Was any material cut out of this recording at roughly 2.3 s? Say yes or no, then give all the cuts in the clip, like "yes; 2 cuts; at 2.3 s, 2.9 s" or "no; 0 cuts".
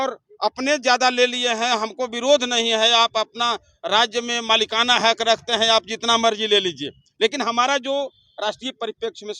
no; 0 cuts